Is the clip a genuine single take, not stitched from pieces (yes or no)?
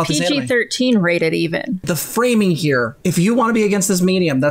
no